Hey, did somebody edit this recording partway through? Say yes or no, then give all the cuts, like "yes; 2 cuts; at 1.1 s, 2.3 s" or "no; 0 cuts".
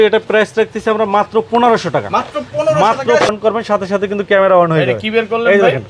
yes; 1 cut; at 3.3 s